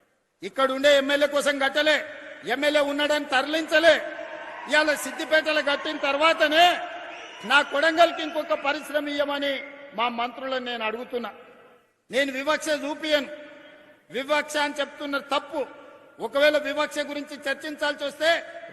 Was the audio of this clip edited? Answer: no; 0 cuts

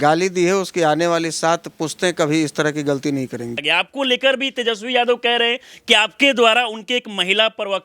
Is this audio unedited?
no; 1 cut; at 3.6 s

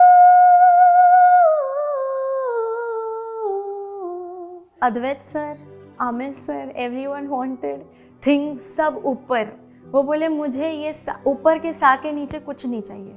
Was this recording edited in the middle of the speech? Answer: yes; 1 cut; at 4.7 s

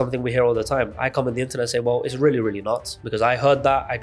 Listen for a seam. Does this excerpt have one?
no; 0 cuts

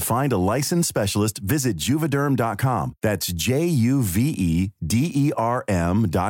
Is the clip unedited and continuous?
yes; 0 cuts

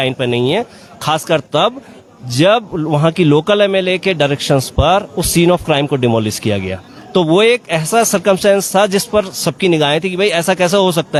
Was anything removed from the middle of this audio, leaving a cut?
no; 0 cuts

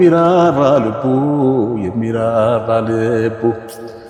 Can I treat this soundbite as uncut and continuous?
yes; 0 cuts

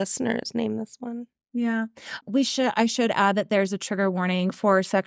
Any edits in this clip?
no; 0 cuts

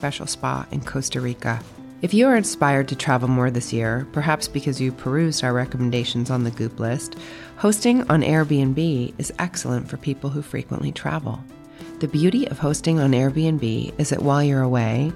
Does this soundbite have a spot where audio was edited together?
no; 0 cuts

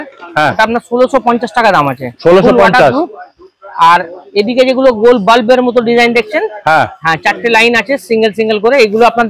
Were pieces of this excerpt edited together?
no; 0 cuts

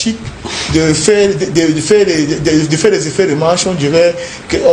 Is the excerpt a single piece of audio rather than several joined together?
yes; 0 cuts

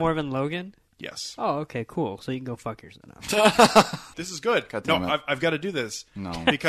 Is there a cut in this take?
yes; 1 cut; at 4.2 s

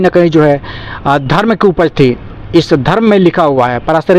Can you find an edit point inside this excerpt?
no; 0 cuts

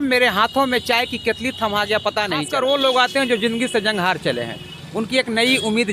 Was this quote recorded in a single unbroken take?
no; 1 cut; at 2.5 s

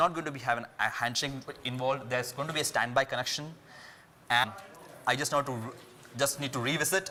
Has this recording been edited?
no; 0 cuts

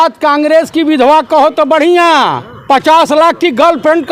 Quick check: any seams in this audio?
no; 0 cuts

